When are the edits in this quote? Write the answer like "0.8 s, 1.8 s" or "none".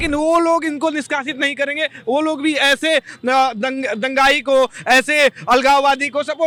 none